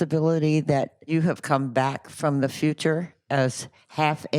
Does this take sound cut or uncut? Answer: cut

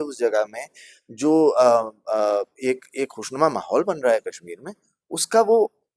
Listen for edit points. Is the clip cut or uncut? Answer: uncut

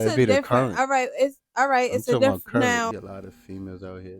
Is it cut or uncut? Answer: cut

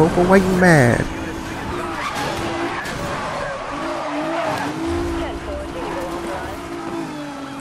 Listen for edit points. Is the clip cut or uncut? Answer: uncut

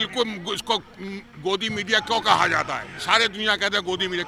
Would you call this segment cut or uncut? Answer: uncut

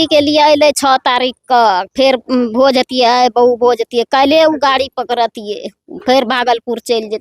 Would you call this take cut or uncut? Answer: uncut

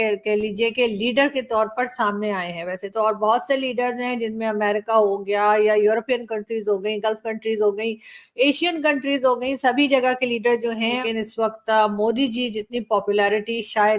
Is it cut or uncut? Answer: cut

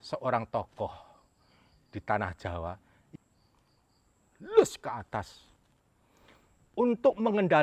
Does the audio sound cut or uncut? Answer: cut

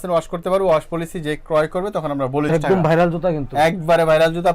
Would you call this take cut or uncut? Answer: cut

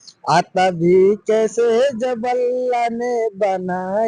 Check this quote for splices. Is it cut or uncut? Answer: uncut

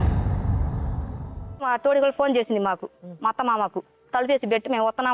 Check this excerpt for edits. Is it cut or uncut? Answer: cut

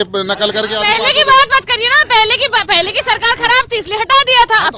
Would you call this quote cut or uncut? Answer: uncut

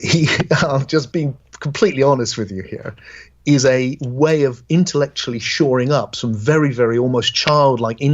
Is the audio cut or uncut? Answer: cut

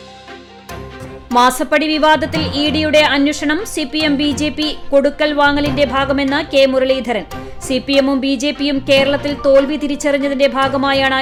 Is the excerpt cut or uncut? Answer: uncut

